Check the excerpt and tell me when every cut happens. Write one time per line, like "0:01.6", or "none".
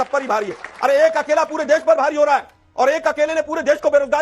none